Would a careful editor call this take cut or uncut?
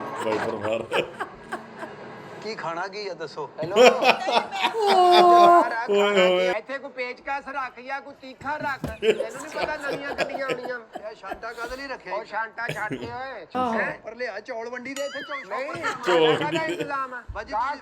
cut